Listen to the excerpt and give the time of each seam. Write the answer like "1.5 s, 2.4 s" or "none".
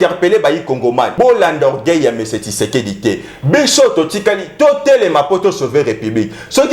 1.1 s